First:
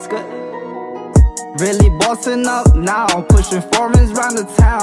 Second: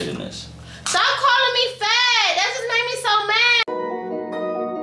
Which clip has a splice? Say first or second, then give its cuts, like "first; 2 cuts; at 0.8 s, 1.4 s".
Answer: second; 2 cuts; at 1.2 s, 3.6 s